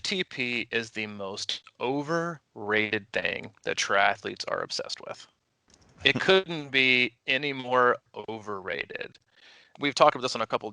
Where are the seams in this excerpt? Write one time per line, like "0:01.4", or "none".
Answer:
0:09.7